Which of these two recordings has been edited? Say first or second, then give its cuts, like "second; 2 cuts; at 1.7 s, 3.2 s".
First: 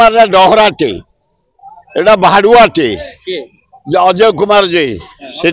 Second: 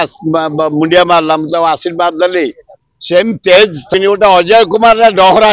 second; 1 cut; at 3.9 s